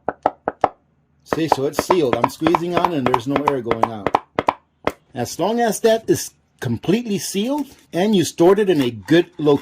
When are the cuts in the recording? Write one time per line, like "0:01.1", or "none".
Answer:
0:05.0
0:07.8